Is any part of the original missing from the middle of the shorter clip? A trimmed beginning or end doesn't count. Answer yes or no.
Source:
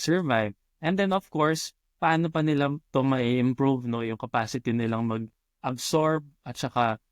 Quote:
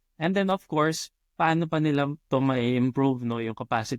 no